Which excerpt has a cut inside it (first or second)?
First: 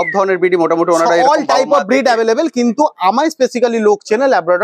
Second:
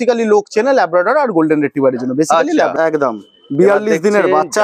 second